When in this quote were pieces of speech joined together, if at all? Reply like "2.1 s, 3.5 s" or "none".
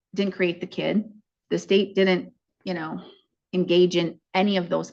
none